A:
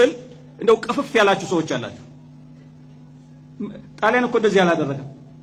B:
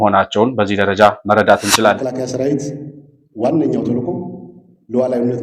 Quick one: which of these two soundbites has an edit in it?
B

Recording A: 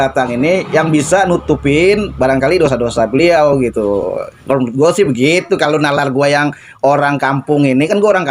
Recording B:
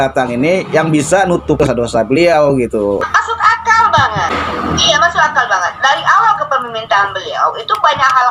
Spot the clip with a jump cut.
B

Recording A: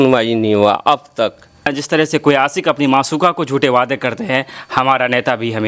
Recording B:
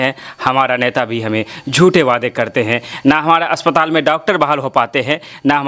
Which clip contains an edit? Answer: A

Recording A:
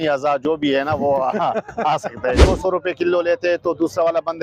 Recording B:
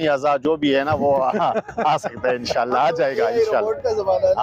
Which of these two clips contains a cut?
A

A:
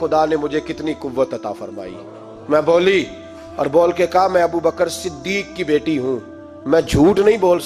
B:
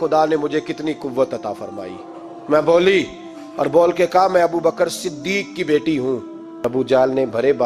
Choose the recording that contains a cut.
B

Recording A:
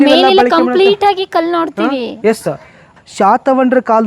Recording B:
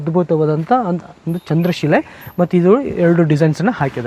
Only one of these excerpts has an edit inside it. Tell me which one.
A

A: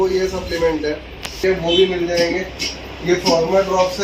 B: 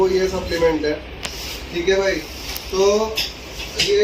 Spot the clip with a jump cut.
A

